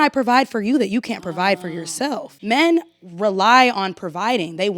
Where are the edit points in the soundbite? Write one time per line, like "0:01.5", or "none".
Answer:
0:02.3